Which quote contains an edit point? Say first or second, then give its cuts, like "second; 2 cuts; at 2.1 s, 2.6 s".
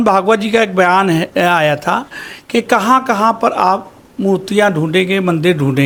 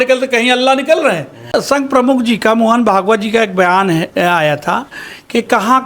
second; 1 cut; at 1.5 s